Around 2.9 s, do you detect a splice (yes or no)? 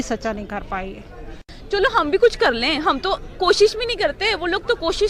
no